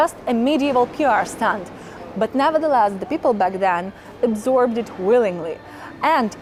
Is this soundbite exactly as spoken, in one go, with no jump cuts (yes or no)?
yes